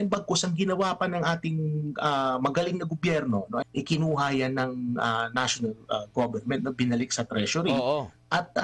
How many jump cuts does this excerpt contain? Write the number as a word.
one